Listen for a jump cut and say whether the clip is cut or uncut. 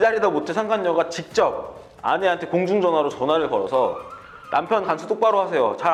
uncut